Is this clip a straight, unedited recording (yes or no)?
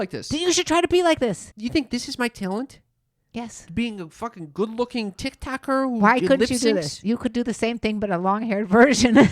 no